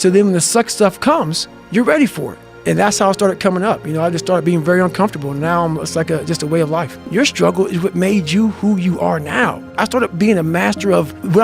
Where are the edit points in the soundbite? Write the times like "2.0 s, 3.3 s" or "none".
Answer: 7.1 s, 9.8 s